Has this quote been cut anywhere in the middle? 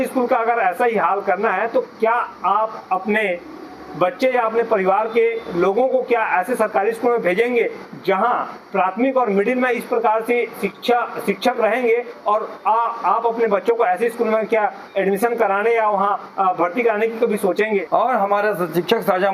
yes; 1 cut; at 17.8 s

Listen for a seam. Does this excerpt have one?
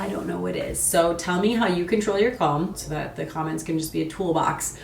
yes; 1 cut; at 2.8 s

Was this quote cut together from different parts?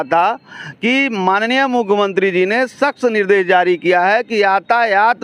no; 0 cuts

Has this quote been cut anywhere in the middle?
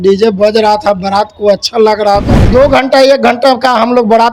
yes; 1 cut; at 2.5 s

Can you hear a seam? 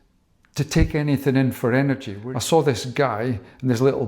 yes; 1 cut; at 2.1 s

